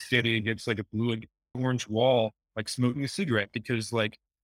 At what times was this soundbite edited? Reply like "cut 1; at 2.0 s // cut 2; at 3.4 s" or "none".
cut 1; at 1.6 s